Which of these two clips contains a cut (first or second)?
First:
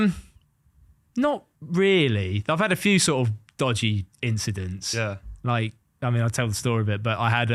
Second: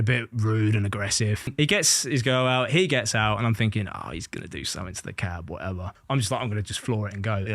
second